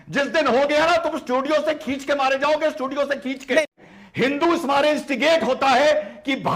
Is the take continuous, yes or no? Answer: no